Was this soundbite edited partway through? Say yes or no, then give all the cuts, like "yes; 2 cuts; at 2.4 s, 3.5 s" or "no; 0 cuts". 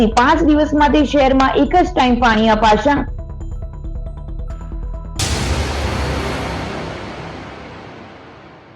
yes; 1 cut; at 5.1 s